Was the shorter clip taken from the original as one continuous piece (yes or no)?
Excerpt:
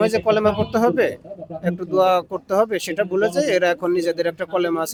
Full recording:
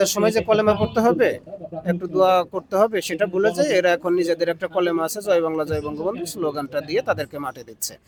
yes